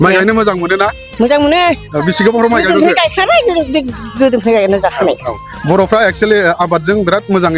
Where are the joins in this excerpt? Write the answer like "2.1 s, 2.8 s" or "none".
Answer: none